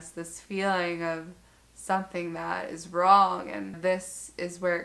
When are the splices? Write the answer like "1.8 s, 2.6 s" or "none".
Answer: 3.8 s